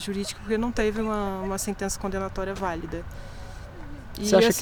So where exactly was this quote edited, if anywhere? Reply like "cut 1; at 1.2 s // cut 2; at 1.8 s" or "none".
none